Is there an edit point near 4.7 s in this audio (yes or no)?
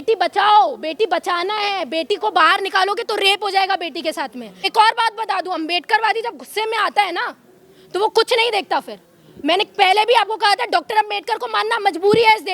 yes